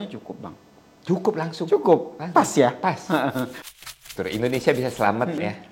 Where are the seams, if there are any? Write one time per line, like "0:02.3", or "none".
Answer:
0:03.6